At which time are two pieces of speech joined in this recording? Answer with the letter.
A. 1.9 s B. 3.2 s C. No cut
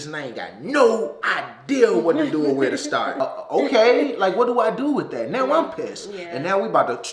B